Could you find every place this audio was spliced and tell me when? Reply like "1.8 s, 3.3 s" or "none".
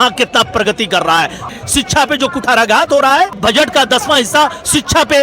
1.4 s